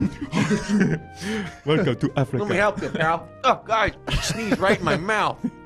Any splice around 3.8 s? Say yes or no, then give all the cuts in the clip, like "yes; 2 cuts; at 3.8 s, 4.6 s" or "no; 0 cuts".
no; 0 cuts